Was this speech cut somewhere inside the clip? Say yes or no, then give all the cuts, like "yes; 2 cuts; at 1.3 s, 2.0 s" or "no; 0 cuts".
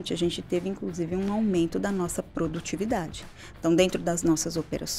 no; 0 cuts